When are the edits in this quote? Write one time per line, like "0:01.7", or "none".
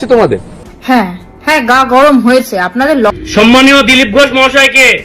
0:03.1